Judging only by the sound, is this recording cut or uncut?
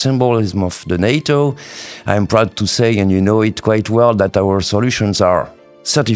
uncut